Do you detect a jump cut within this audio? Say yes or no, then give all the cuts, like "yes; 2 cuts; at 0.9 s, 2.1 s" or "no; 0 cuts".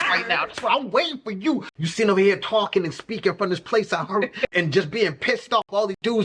yes; 1 cut; at 1.7 s